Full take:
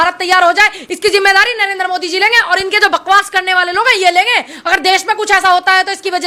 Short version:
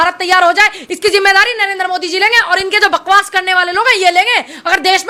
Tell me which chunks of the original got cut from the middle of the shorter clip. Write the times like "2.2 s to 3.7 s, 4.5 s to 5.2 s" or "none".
none

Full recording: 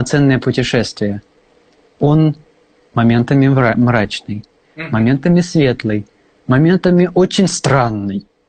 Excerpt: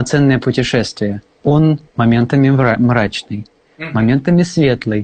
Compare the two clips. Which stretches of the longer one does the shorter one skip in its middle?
1.3 s to 1.8 s, 2.4 s to 2.8 s

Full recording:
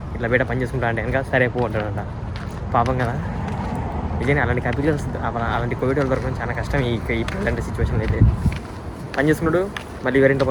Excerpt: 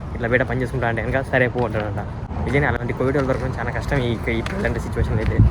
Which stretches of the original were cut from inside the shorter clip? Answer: 2.7 s to 5.6 s

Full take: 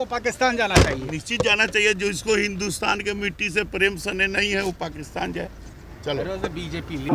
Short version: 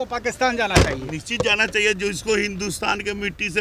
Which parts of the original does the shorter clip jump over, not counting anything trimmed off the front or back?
none

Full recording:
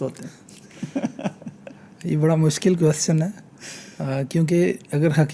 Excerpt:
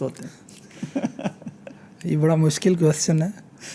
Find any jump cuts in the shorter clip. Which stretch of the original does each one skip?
none

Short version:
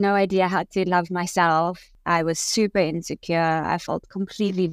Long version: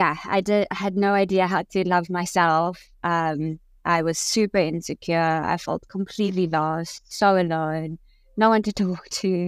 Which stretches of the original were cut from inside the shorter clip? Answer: 2.9 s to 3.7 s

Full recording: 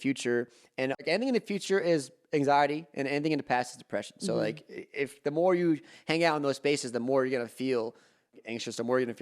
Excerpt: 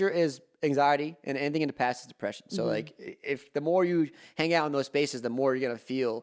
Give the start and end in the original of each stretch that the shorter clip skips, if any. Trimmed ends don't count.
none

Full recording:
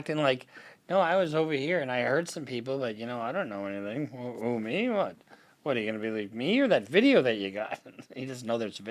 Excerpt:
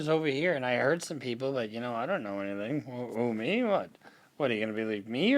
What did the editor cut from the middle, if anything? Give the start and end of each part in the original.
none

